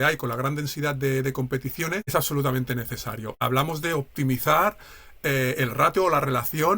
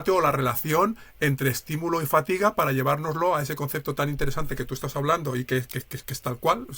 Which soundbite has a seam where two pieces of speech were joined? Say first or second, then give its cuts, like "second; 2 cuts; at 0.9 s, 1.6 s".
first; 2 cuts; at 2.1 s, 3.4 s